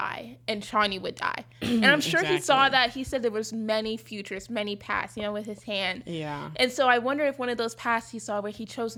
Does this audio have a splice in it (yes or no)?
no